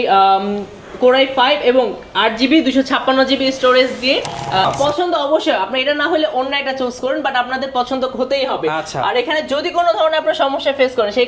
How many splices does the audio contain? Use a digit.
1